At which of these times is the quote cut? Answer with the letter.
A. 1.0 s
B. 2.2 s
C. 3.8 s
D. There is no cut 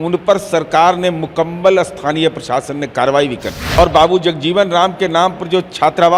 C